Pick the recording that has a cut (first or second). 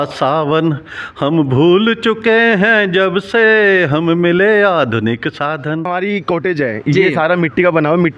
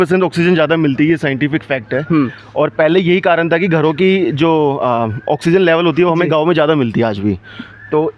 first